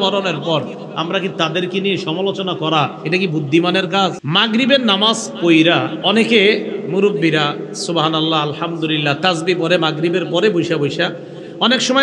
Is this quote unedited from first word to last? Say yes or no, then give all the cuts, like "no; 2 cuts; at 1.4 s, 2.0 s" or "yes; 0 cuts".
no; 1 cut; at 4.2 s